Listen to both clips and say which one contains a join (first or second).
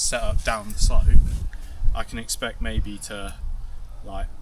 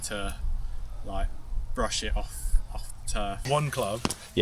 second